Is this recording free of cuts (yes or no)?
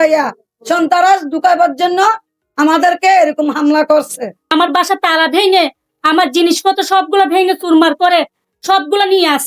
no